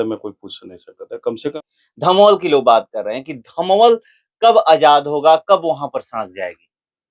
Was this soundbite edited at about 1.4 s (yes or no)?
yes